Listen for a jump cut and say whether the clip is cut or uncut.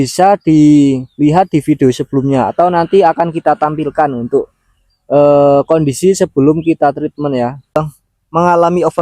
cut